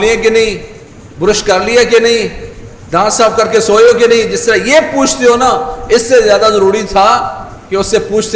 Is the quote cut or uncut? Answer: uncut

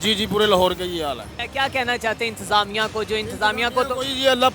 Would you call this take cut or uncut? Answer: cut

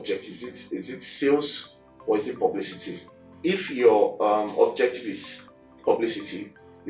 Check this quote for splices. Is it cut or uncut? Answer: uncut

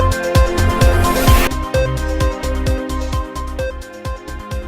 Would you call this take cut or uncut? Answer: uncut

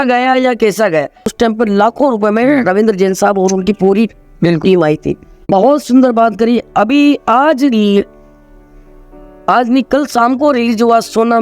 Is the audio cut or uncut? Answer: cut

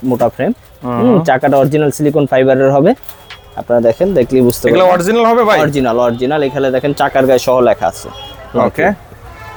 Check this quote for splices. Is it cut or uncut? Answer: uncut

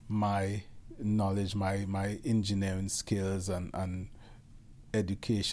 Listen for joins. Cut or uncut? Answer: uncut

